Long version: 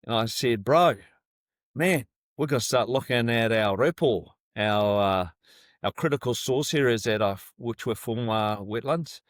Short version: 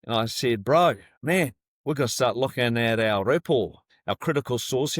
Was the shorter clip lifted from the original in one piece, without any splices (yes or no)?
no